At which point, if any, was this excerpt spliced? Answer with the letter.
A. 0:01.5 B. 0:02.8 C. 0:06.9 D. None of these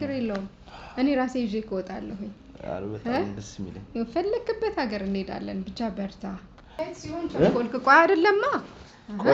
C